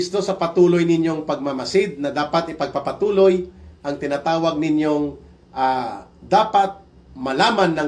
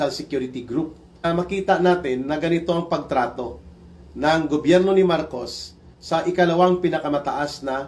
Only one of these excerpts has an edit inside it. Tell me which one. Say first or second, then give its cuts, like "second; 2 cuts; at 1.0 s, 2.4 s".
second; 1 cut; at 1.2 s